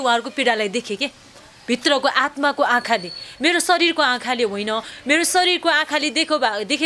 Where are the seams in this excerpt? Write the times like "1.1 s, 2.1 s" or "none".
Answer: none